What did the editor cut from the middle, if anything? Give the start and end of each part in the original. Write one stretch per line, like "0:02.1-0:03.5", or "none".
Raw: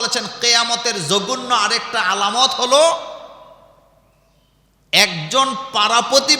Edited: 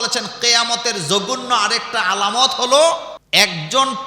0:03.2-0:04.8